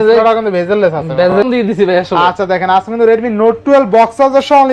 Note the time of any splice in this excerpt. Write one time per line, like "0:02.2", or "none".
0:01.3